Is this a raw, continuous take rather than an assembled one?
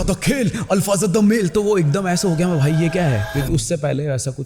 yes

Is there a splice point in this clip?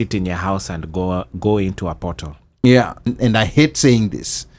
yes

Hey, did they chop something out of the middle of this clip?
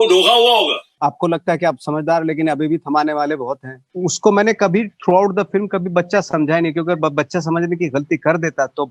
yes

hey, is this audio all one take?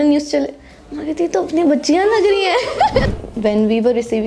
no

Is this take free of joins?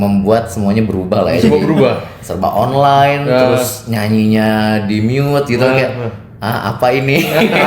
yes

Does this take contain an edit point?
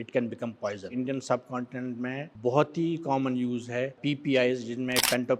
yes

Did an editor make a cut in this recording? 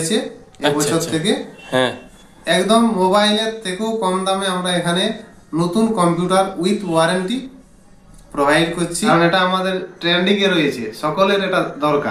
yes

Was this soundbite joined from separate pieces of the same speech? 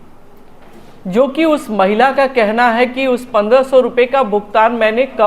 no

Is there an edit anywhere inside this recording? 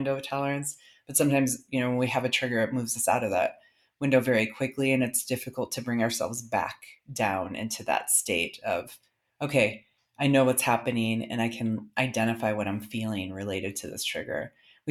no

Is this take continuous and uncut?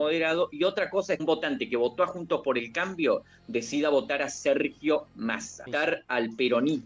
no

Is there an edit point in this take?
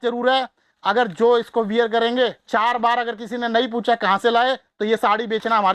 no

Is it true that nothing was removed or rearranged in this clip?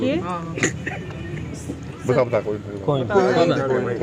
yes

